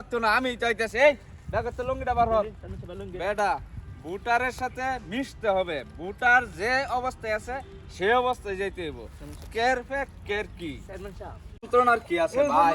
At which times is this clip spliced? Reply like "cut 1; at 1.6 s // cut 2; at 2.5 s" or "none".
cut 1; at 11.7 s